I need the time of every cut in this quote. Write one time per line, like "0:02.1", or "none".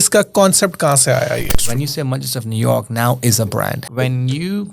0:01.5
0:03.8